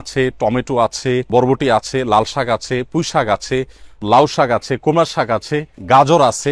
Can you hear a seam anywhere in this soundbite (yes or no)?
yes